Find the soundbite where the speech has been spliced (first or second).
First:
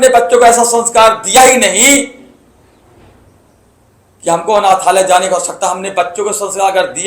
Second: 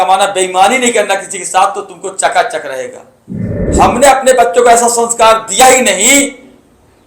second